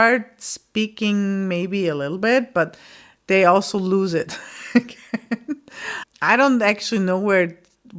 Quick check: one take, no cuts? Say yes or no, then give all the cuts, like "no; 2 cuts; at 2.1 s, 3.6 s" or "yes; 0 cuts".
yes; 0 cuts